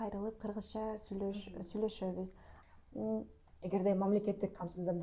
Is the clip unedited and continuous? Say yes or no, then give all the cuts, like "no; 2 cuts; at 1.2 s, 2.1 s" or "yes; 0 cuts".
no; 1 cut; at 2.5 s